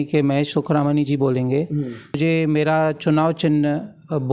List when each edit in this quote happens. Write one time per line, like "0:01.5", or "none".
0:02.2